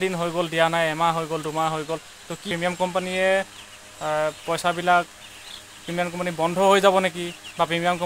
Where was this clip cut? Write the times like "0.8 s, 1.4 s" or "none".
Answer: 2.5 s